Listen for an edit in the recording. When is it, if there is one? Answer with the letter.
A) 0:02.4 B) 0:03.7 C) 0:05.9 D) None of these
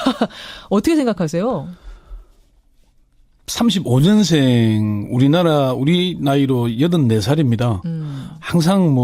C